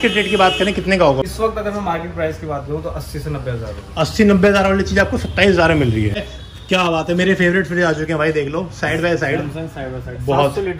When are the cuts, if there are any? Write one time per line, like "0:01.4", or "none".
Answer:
0:01.2
0:06.2